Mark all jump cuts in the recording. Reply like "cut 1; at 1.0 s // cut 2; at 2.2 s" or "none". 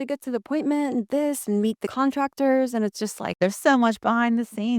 cut 1; at 1.9 s // cut 2; at 3.4 s